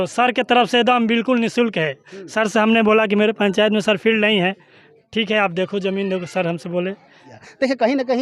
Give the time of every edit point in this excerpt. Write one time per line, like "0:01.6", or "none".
0:07.3